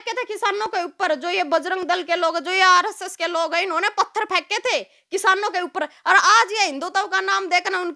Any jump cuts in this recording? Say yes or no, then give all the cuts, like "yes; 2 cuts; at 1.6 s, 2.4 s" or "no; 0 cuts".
no; 0 cuts